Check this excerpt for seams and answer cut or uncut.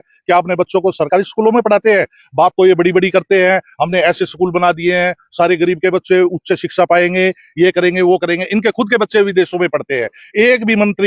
uncut